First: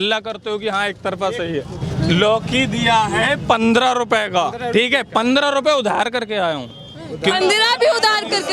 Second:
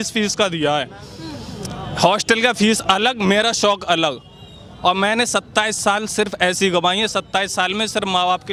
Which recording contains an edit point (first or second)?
first